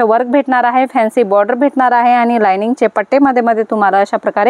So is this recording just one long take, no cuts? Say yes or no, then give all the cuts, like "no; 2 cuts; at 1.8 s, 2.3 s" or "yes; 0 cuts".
yes; 0 cuts